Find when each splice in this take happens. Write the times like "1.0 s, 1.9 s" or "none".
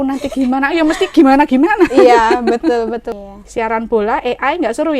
3.2 s